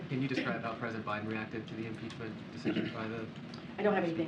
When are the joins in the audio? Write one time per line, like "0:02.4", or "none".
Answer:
none